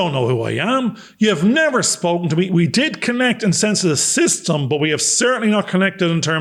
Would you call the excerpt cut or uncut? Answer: uncut